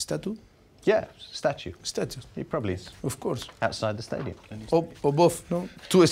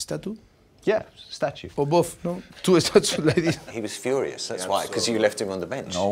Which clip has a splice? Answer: second; 2 cuts; at 1.7 s, 3.7 s

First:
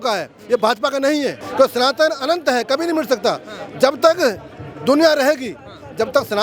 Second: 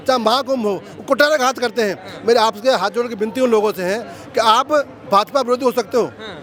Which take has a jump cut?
first; 1 cut; at 1.4 s

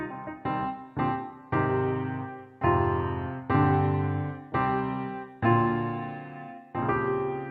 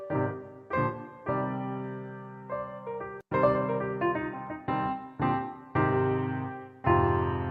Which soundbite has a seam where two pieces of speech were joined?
second; 1 cut; at 3.2 s

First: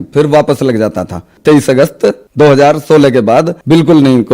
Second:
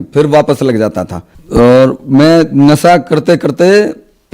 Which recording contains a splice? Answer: second; 1 cut; at 1.4 s

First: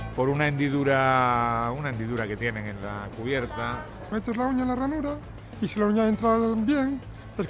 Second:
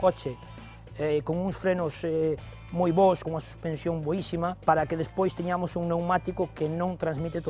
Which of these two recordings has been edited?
second; 1 cut; at 3.2 s

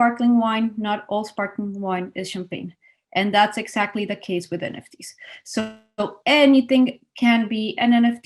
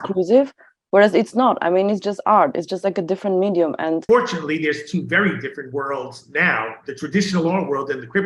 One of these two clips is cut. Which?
second; 1 cut; at 4.0 s

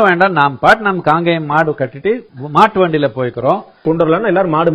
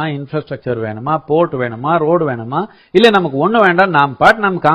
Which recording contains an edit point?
first; 2 cuts; at 2.3 s, 3.8 s

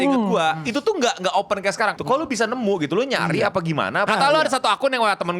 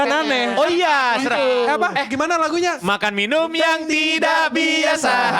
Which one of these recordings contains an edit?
first; 2 cuts; at 1.9 s, 4.1 s

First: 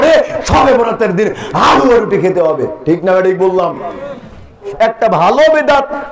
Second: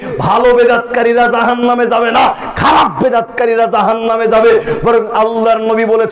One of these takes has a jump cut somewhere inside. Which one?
first; 1 cut; at 4.6 s

